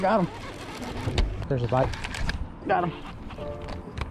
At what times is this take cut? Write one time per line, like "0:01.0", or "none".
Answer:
0:01.3